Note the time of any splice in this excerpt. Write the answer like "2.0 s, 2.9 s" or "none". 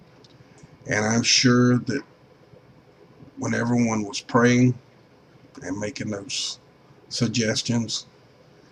none